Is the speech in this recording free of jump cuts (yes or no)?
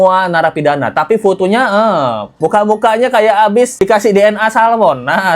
no